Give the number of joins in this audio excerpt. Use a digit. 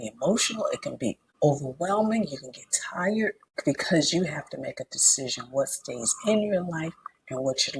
2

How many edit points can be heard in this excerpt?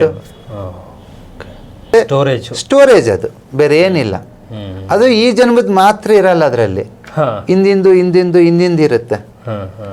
1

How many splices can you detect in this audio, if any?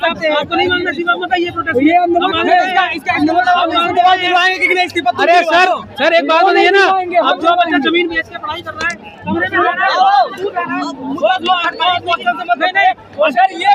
0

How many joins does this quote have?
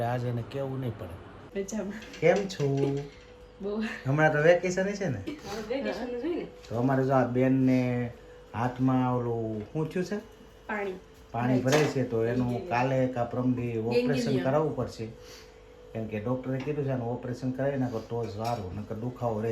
1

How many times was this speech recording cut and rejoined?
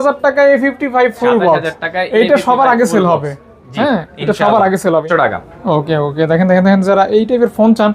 1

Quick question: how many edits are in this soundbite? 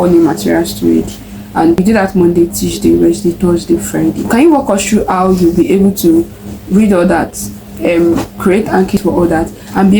2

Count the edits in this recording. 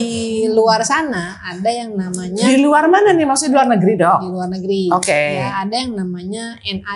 0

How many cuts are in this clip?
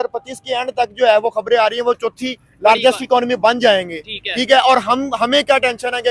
0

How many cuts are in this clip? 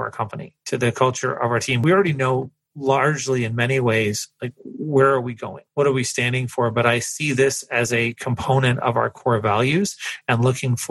2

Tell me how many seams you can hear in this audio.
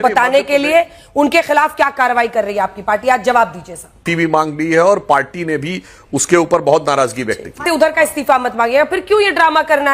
2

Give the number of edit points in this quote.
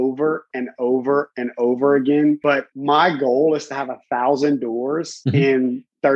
2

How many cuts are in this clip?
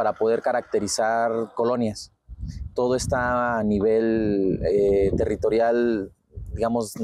0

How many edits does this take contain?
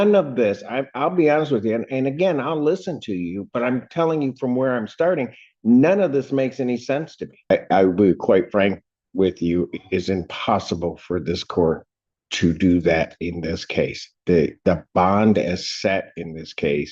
1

